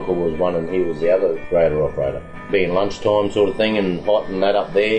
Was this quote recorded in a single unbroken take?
no; 2 cuts; at 1.4 s, 2.4 s

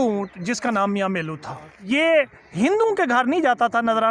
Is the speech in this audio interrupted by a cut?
yes; 1 cut; at 1.7 s

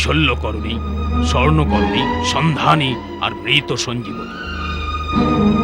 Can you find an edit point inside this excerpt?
no; 0 cuts

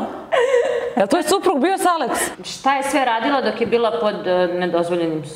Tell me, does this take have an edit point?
yes; 1 cut; at 2.3 s

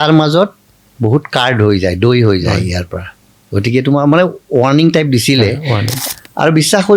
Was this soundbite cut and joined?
yes; 1 cut; at 5.9 s

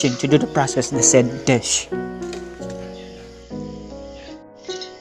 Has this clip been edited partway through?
yes; 1 cut; at 1.7 s

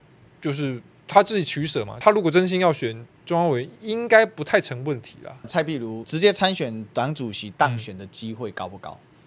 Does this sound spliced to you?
yes; 2 cuts; at 1.9 s, 5.7 s

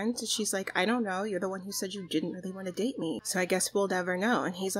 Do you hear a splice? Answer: no; 0 cuts

